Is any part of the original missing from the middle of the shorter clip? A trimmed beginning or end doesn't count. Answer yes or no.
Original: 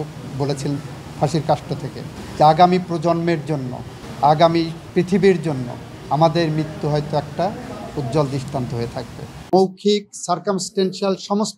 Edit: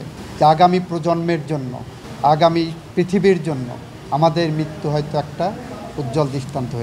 no